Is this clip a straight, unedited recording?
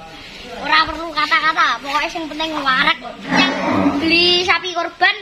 no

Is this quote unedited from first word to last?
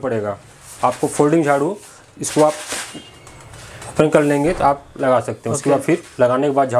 yes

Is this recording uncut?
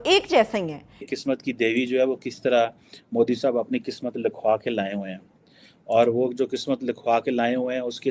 no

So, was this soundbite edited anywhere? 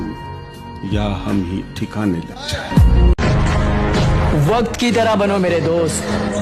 yes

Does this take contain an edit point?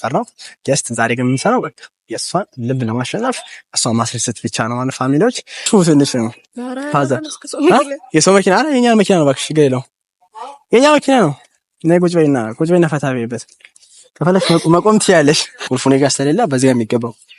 yes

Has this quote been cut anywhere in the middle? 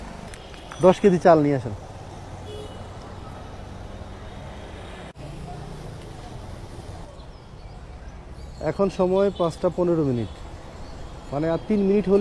yes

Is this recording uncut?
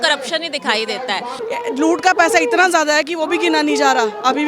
no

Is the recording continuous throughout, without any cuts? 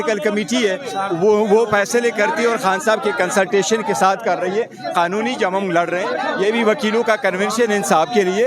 yes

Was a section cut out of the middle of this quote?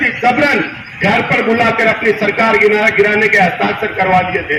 no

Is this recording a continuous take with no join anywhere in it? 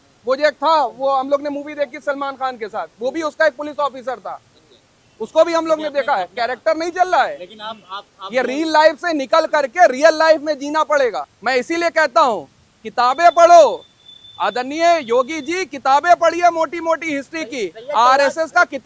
no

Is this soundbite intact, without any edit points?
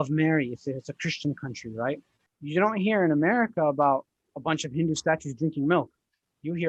no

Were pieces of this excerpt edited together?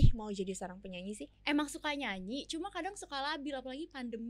yes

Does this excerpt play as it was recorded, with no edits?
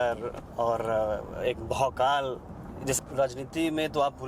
no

